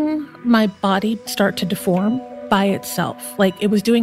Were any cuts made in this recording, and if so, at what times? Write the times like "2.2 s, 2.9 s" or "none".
1.2 s, 2.3 s